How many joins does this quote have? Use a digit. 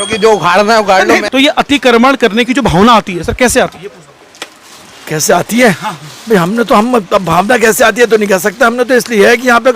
1